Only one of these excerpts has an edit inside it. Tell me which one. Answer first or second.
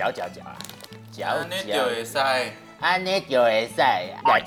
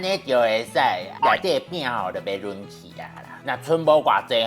second